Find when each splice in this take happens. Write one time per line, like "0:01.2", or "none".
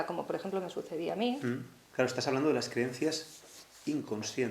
0:01.8